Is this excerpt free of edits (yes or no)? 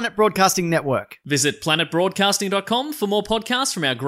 yes